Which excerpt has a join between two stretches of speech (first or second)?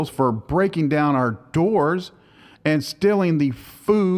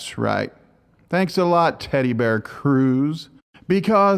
first